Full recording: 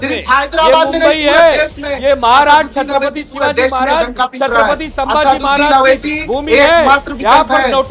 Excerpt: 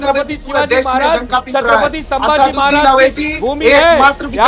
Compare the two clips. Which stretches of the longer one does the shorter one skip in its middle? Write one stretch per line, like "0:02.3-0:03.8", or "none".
none